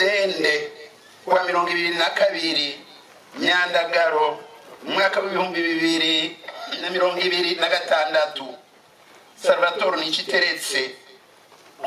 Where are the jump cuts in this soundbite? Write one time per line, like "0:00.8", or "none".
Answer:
0:06.7